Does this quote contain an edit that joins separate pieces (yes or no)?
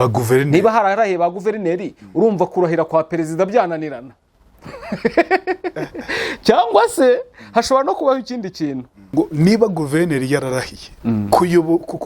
yes